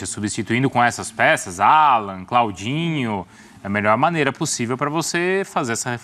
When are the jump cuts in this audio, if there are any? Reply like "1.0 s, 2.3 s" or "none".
none